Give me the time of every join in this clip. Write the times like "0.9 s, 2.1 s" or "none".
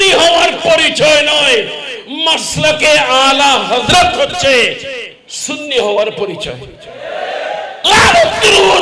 7.8 s